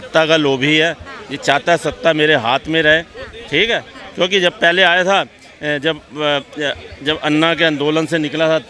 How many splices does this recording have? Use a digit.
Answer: 0